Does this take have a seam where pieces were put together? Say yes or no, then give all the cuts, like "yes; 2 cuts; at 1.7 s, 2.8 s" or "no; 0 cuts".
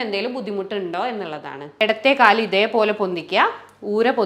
yes; 1 cut; at 1.6 s